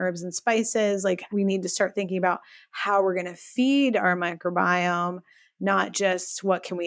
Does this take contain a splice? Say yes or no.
yes